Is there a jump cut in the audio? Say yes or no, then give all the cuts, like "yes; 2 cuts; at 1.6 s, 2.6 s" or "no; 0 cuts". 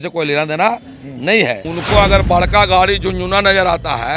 yes; 1 cut; at 1.6 s